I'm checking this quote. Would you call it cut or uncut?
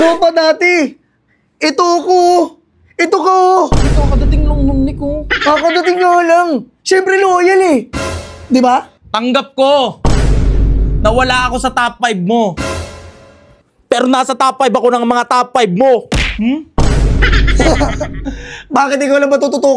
uncut